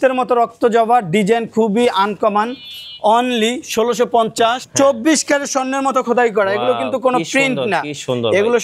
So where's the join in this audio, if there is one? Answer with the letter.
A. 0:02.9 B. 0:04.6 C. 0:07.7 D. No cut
B